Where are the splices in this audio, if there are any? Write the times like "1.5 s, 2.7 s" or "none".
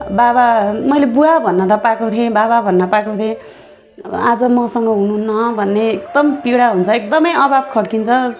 none

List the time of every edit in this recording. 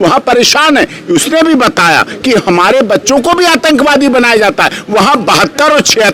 none

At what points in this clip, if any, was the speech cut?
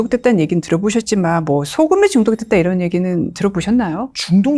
none

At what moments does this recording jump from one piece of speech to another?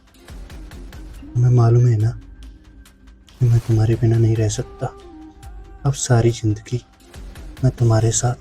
none

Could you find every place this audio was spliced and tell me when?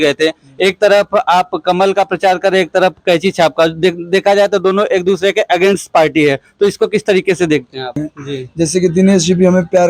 8.0 s

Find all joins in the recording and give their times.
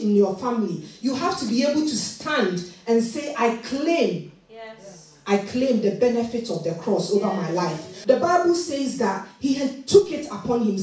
7.9 s

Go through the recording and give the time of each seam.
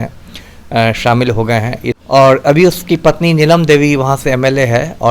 1.9 s

